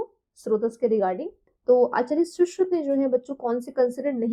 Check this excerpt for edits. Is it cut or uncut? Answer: uncut